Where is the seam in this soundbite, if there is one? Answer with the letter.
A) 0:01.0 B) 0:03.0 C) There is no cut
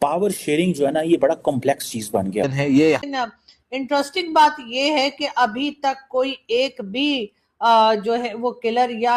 B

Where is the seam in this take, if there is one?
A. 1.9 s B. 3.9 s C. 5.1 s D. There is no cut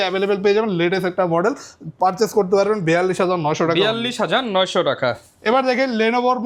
D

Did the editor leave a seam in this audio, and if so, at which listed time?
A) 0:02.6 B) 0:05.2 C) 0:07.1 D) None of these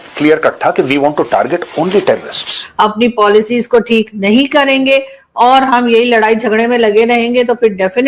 A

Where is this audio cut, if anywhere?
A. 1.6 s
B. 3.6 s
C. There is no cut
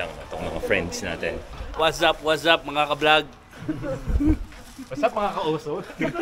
A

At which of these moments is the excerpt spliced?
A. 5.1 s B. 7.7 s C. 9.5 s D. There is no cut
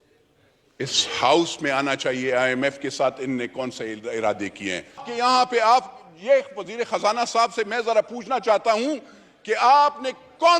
A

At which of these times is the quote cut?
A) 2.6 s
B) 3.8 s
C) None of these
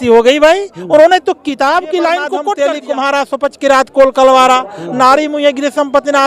A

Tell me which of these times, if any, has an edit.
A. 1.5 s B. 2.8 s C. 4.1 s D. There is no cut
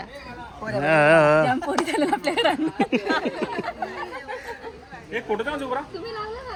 D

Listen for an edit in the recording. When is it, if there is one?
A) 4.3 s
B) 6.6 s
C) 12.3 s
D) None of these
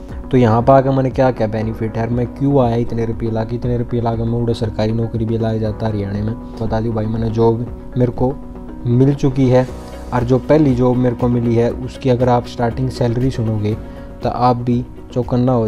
B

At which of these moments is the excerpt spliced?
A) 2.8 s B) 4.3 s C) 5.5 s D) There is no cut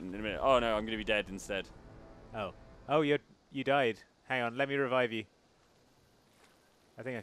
A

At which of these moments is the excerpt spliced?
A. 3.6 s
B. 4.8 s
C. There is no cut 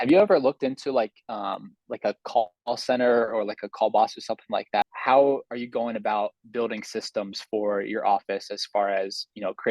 B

